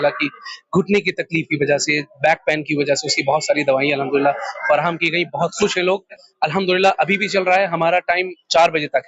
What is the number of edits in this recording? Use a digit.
0